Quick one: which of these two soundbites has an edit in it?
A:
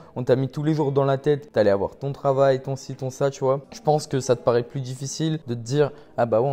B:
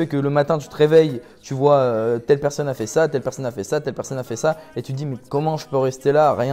A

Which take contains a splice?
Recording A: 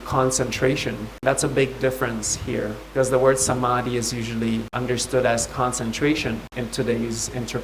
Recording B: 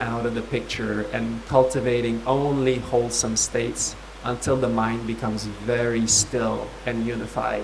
A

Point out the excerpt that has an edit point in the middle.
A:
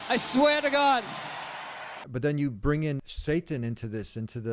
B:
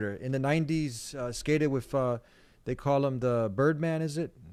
A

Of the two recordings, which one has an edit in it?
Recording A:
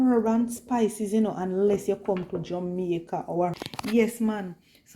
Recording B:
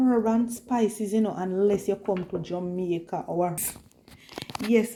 A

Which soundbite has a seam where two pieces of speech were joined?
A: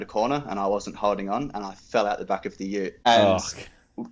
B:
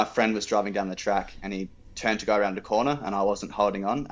A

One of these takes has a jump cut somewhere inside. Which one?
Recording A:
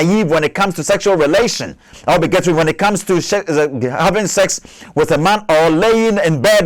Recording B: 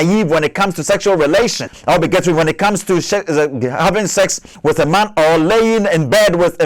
B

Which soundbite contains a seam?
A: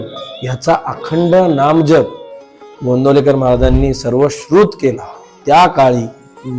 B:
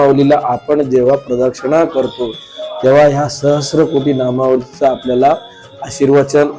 A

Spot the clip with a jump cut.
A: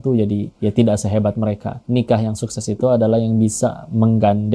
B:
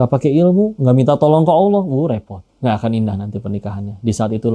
A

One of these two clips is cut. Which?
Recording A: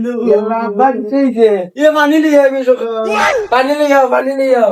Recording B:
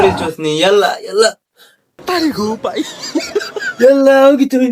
B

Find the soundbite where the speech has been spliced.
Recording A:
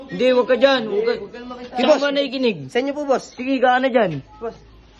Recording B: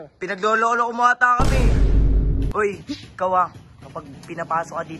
B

